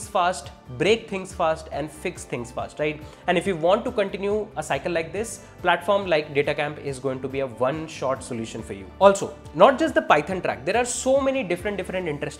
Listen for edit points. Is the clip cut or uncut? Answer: uncut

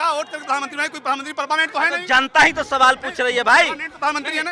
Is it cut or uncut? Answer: uncut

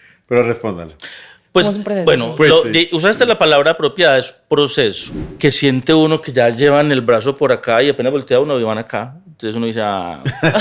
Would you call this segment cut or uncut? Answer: cut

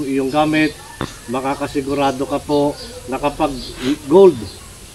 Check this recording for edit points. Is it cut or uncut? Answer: uncut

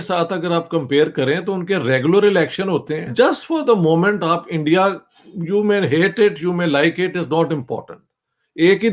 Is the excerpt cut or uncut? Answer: cut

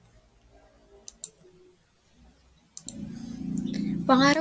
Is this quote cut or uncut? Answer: cut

